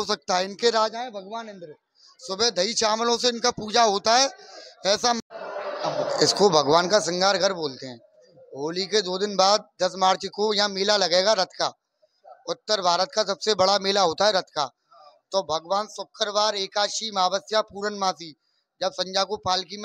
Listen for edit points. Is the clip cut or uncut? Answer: cut